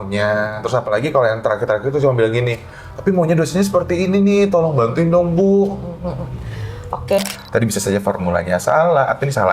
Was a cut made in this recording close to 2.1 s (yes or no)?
no